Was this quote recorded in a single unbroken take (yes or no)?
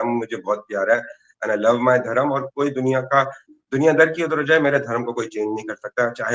yes